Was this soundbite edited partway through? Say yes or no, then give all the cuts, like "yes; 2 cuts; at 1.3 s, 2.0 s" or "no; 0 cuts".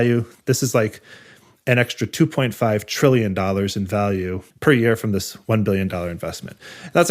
yes; 1 cut; at 4.5 s